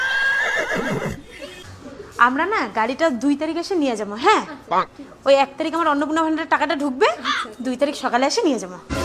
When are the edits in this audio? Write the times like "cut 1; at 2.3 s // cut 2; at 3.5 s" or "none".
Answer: cut 1; at 1.7 s